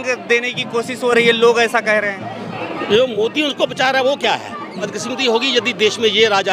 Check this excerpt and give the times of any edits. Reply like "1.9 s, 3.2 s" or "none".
5.0 s